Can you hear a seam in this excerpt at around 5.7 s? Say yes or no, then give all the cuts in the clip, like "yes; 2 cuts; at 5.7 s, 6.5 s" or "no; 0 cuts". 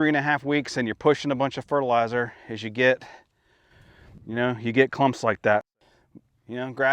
yes; 1 cut; at 5.7 s